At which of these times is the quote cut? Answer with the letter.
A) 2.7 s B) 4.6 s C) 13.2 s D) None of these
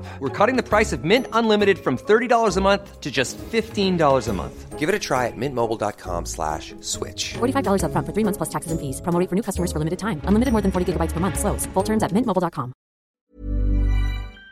C